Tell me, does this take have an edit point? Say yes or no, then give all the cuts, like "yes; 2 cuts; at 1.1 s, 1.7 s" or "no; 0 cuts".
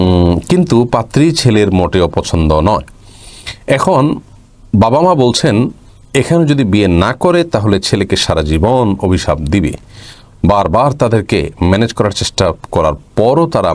no; 0 cuts